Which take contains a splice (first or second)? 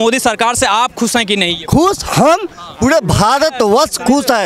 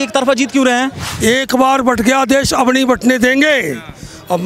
second